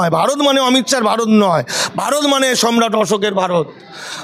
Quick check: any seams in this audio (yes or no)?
no